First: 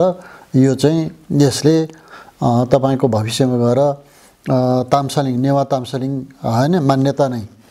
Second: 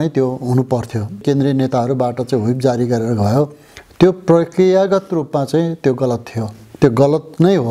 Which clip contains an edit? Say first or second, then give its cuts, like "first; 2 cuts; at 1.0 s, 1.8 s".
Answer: second; 1 cut; at 1.2 s